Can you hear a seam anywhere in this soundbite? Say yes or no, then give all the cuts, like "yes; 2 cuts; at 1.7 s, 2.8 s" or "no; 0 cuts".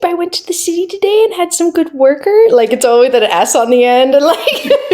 no; 0 cuts